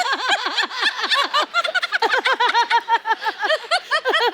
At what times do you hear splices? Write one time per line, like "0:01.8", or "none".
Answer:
none